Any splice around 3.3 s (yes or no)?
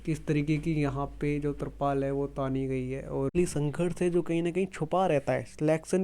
yes